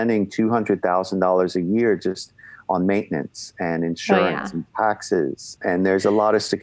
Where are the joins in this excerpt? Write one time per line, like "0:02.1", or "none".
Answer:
0:05.5

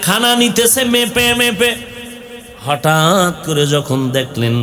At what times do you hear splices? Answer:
none

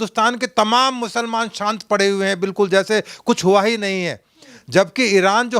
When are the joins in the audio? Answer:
none

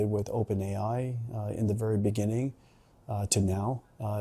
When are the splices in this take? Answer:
none

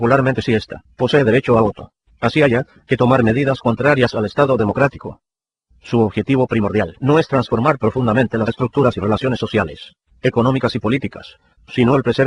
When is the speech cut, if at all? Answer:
0:07.7

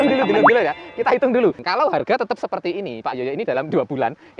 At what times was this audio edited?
0:01.6

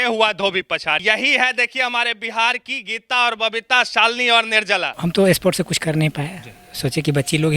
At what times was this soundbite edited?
0:01.0
0:04.9

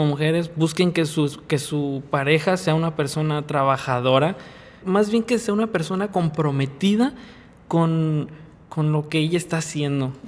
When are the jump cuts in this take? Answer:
0:04.7

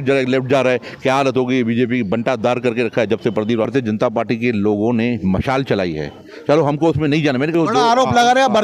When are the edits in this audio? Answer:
0:03.7
0:07.5

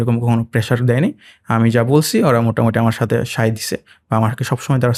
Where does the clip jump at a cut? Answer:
none

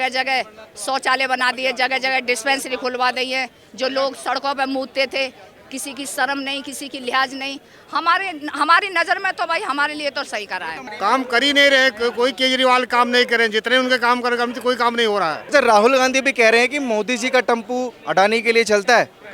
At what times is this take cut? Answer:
0:10.8
0:15.4

